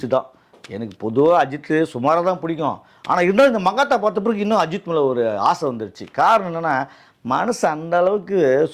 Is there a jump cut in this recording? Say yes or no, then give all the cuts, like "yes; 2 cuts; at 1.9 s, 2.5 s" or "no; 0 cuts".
no; 0 cuts